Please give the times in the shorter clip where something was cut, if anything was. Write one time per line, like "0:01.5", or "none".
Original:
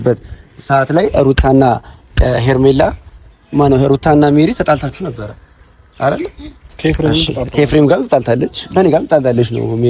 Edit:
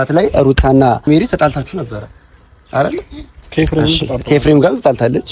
0:01.1